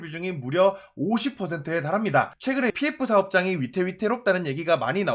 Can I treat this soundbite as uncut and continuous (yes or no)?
no